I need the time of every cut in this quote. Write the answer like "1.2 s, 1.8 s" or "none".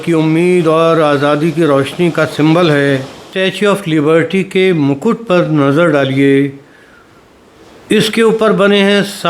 3.3 s

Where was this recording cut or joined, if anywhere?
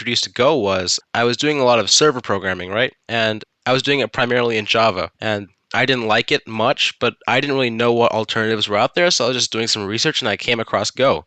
1.0 s, 3.3 s, 5.1 s

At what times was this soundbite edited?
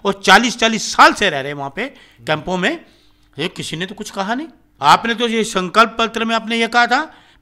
4.6 s

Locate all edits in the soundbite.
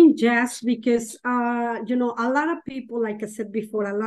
none

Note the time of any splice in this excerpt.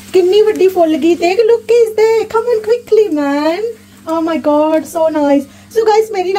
none

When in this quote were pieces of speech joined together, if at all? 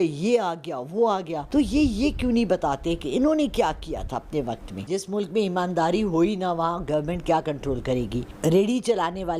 1.4 s, 4.7 s, 8.3 s

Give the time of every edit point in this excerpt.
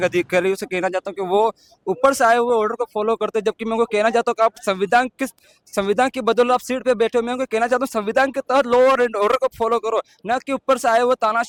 none

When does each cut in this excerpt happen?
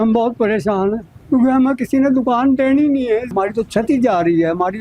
1.1 s, 3.3 s

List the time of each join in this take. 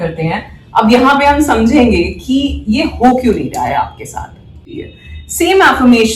4.6 s

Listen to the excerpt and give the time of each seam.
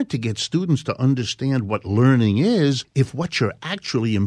2.9 s

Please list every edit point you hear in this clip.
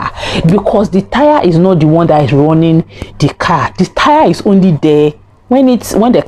none

